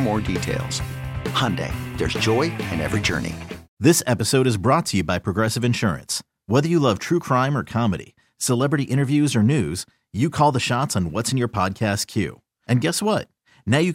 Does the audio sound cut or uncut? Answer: cut